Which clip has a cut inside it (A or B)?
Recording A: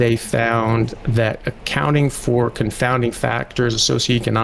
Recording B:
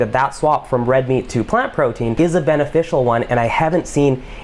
B